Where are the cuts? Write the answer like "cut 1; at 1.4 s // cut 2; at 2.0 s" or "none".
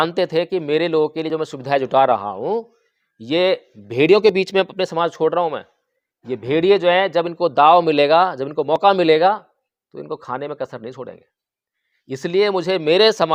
none